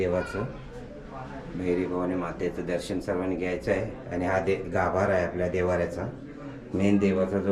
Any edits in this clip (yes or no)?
no